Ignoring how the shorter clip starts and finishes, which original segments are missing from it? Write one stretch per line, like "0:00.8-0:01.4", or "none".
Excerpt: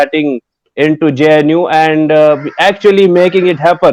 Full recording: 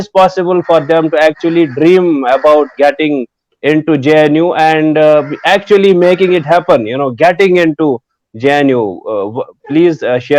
none